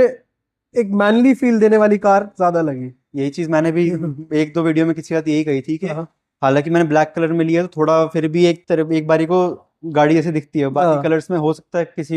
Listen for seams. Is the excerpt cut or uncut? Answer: uncut